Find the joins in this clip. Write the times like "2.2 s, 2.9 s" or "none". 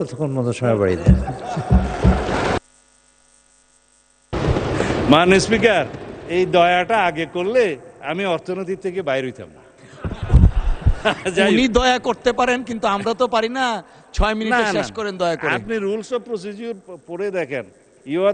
none